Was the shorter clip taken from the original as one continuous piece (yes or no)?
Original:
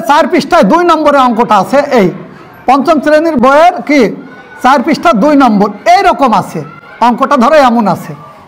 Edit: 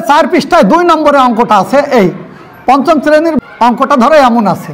no